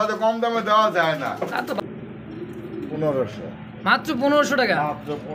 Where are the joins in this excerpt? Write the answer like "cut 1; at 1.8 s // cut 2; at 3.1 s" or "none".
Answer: cut 1; at 1.8 s